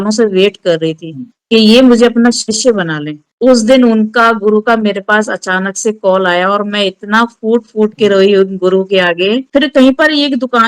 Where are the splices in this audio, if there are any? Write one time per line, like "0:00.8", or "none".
0:09.4